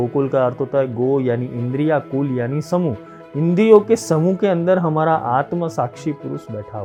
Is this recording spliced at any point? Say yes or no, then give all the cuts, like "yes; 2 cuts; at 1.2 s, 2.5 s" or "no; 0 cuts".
no; 0 cuts